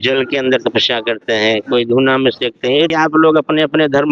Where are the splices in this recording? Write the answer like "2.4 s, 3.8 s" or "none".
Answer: 2.9 s